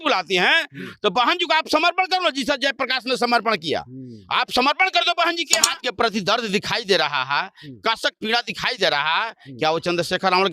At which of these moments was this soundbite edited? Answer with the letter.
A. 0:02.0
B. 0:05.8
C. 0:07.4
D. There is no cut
B